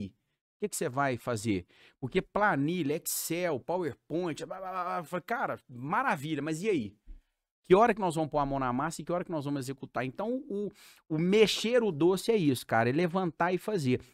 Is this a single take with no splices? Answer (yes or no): yes